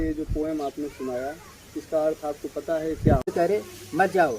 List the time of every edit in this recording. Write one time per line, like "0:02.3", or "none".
0:03.3

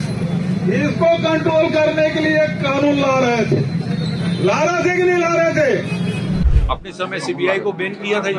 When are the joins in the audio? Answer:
0:06.5

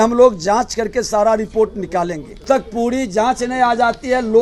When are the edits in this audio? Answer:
0:02.4

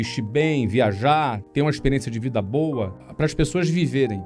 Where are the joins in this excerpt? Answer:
0:03.1

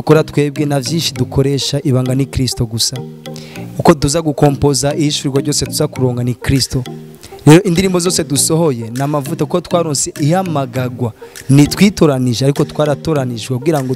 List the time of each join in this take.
none

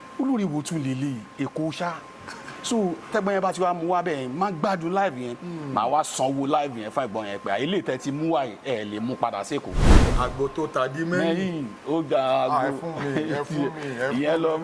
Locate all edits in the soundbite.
0:09.9

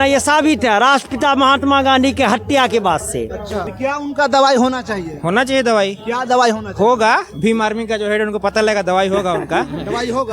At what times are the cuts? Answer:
0:03.6

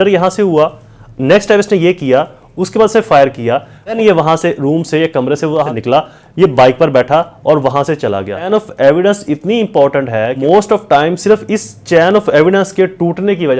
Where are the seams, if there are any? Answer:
0:03.9
0:05.7
0:08.5
0:10.3

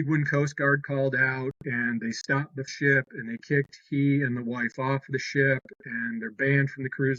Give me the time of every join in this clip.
none

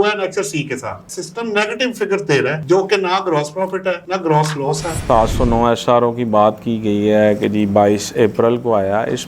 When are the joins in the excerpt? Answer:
0:01.0
0:05.0

